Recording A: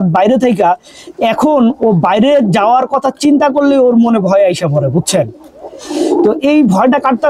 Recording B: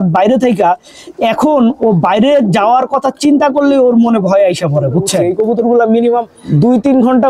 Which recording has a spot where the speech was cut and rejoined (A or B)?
B